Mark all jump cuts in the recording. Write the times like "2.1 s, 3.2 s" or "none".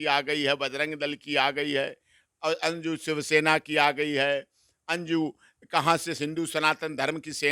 none